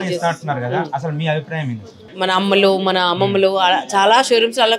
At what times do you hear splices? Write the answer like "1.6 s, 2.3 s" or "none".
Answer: 2.1 s